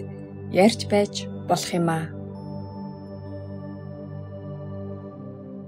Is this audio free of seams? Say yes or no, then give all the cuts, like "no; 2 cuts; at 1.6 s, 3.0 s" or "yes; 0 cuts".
yes; 0 cuts